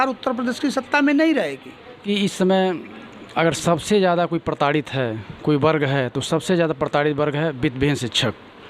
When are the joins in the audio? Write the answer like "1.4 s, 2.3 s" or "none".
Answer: 2.0 s

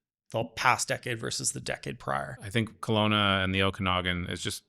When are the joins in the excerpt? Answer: 2.3 s

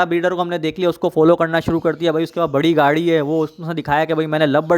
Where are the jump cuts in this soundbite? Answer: none

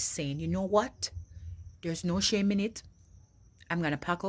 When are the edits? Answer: none

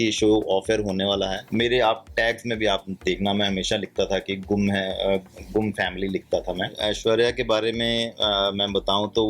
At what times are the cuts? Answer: 1.4 s, 6.7 s

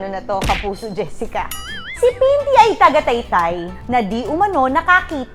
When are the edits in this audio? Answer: none

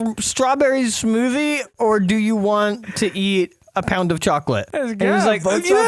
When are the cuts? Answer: 1.7 s, 4.7 s

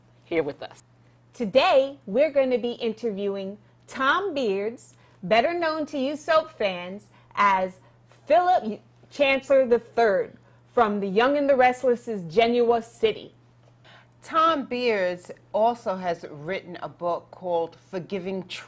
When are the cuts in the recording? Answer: 16.8 s

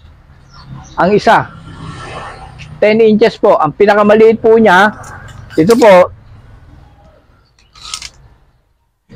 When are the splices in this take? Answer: none

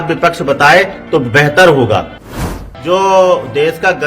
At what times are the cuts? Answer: 2.4 s

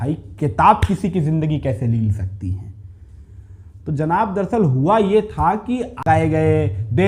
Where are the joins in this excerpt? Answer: 6.0 s

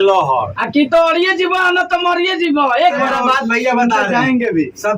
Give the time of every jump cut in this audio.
3.0 s

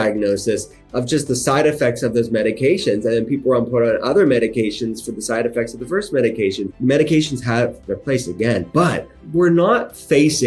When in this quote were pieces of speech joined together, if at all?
6.7 s, 9.1 s

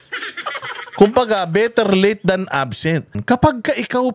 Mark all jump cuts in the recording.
3.1 s

